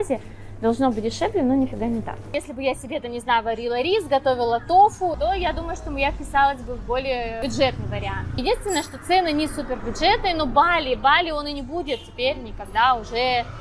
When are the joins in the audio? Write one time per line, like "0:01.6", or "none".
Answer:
0:02.4
0:05.2
0:07.4
0:08.4